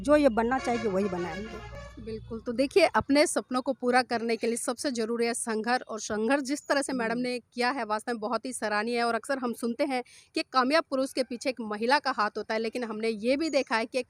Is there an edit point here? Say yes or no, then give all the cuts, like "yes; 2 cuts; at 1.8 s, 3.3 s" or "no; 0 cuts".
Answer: no; 0 cuts